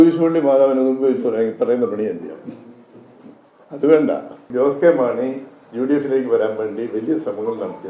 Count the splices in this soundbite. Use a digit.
1